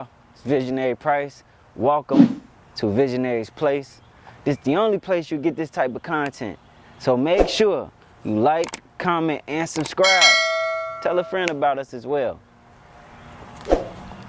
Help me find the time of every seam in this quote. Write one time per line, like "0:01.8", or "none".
none